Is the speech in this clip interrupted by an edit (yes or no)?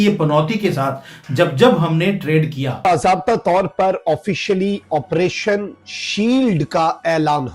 yes